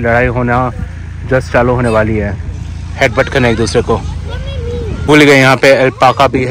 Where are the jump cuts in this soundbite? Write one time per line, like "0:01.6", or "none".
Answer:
0:05.0